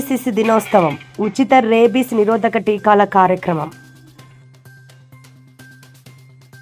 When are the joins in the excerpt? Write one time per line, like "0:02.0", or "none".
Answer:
none